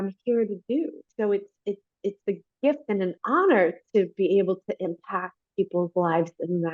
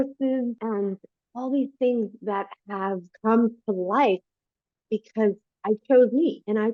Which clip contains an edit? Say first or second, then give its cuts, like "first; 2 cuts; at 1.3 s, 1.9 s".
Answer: first; 1 cut; at 1.0 s